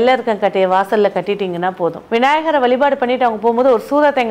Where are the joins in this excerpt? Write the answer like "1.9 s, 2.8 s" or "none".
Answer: 2.0 s

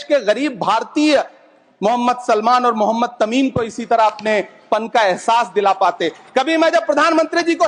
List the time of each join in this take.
none

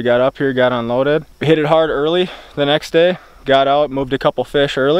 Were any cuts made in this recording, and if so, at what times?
1.3 s

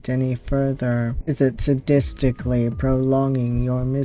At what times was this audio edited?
1.2 s

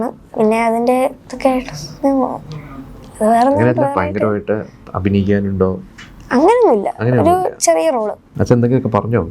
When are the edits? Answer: 8.3 s

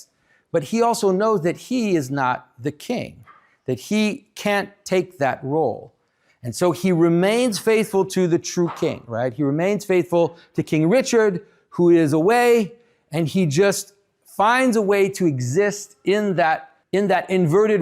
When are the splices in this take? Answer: 16.7 s

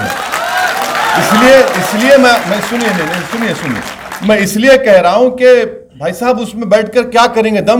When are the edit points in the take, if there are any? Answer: none

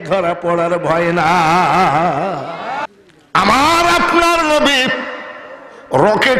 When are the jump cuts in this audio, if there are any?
2.8 s

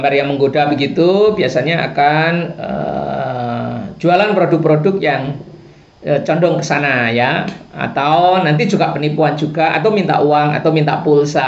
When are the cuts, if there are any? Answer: none

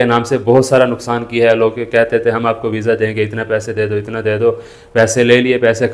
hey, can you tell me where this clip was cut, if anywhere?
none

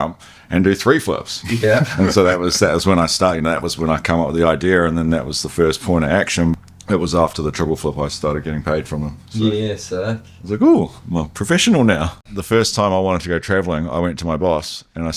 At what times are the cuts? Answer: 6.5 s, 12.2 s

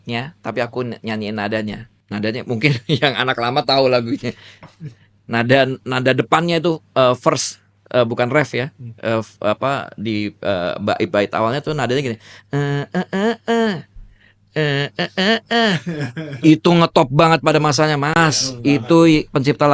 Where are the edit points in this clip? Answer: 1.9 s

